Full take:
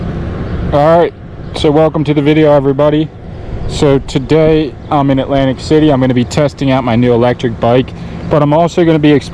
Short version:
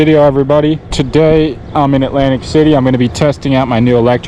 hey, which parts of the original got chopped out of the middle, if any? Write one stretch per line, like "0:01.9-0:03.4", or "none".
0:03.3-0:04.1